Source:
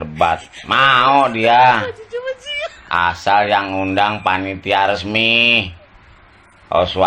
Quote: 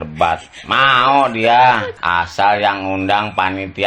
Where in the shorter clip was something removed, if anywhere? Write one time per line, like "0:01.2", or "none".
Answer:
0:01.9